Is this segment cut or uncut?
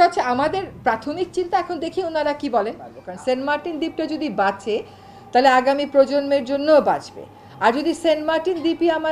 cut